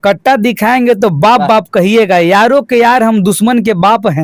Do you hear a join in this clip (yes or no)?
no